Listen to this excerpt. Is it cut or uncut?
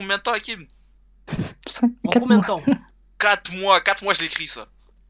uncut